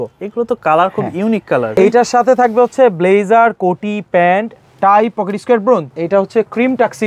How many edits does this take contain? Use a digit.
2